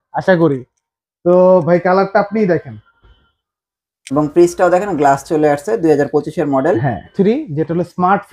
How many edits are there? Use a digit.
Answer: 1